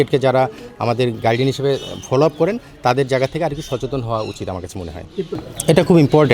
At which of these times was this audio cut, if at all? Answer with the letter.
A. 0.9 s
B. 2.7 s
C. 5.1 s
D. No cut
D